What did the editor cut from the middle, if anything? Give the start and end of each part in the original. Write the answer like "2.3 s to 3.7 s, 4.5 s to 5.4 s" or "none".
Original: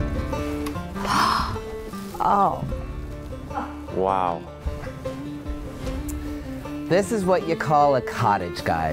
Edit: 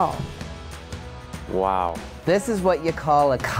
4.6 s to 6.8 s